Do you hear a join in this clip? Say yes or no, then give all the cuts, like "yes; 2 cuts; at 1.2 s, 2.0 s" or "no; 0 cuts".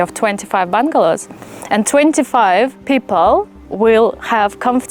yes; 1 cut; at 2.8 s